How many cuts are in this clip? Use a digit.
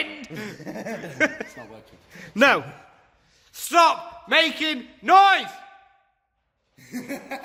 0